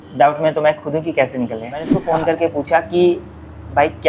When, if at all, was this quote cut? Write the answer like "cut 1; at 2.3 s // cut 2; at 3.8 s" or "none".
cut 1; at 2.0 s